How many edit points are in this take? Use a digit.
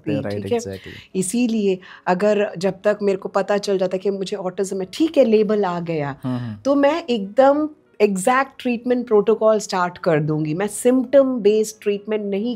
0